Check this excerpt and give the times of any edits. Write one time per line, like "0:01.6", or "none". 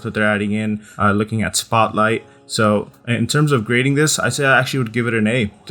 0:00.9
0:02.7